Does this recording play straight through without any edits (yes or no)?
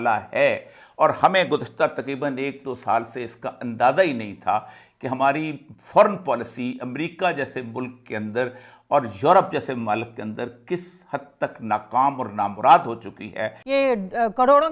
no